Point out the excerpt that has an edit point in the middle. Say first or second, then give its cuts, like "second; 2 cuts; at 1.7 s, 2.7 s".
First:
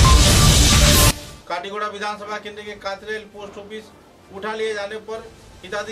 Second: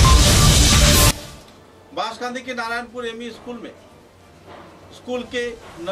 second; 1 cut; at 1.3 s